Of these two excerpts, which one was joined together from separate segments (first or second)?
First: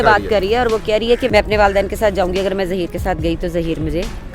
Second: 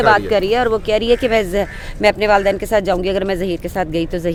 first